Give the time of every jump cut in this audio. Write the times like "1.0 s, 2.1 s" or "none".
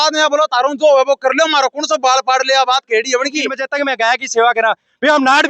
3.6 s

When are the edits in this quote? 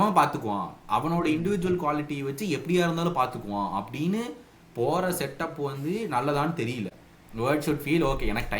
6.9 s

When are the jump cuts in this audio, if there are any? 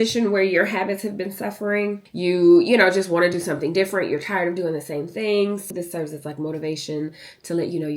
2.1 s, 5.7 s

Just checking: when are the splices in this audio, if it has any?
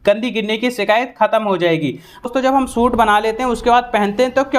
2.2 s

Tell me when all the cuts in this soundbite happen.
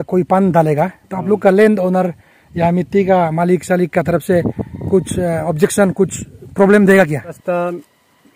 7.4 s

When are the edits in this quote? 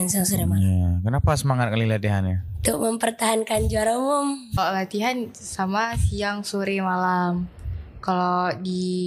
4.6 s

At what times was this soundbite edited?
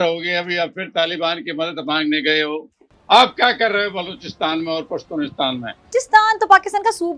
2.9 s, 5.9 s

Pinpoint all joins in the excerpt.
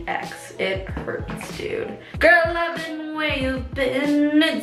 none

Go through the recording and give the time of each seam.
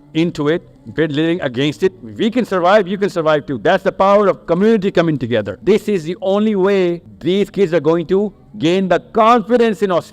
5.6 s, 7.1 s

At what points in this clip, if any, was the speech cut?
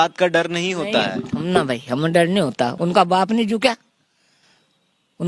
2.8 s

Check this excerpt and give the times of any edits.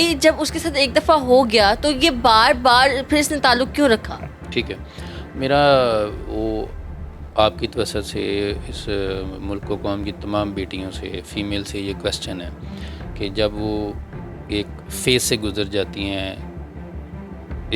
none

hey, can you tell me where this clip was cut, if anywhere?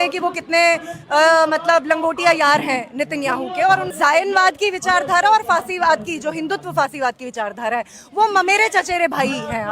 3.9 s

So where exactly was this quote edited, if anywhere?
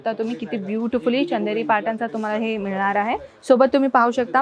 none

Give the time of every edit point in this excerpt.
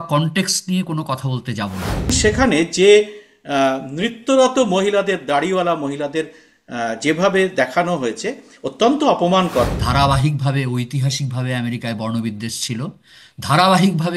2.1 s, 9.8 s

